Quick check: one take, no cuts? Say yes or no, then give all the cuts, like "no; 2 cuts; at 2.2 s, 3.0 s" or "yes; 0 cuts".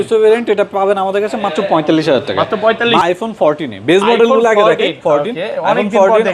no; 1 cut; at 3.0 s